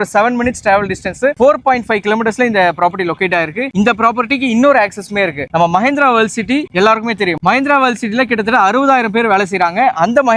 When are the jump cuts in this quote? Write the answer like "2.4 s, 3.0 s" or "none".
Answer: none